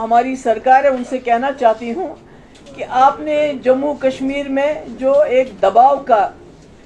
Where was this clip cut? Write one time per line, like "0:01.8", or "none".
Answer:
none